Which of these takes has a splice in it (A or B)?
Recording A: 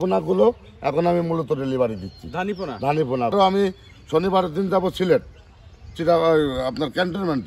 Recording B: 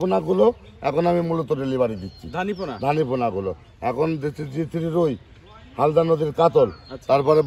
A